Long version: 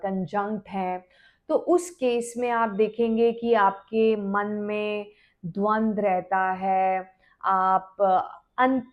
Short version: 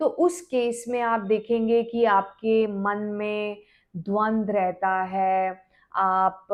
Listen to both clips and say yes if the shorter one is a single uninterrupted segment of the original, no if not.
yes